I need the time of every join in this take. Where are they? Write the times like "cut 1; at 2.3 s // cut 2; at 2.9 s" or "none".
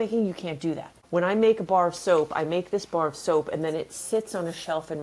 cut 1; at 0.9 s